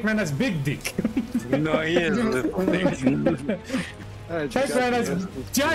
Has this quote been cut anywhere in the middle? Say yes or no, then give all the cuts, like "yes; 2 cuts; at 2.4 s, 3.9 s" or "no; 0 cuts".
yes; 1 cut; at 3.9 s